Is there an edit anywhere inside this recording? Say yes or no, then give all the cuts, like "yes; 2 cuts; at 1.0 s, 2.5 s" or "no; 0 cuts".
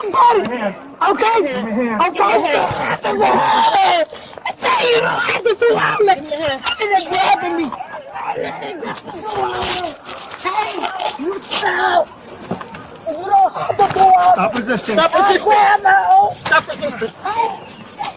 no; 0 cuts